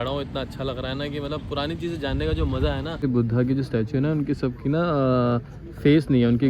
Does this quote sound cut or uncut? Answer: cut